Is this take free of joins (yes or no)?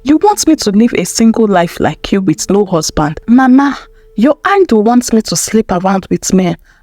no